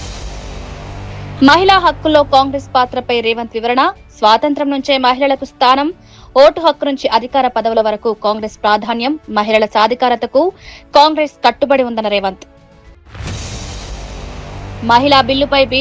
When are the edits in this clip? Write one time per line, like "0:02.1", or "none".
0:01.0